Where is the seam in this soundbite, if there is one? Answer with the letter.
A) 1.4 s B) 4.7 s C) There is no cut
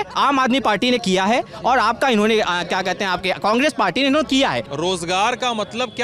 B